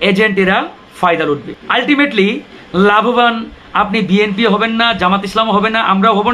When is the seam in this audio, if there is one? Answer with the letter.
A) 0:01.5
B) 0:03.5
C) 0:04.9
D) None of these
A